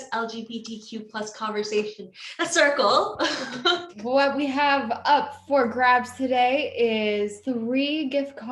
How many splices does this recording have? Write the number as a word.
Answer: two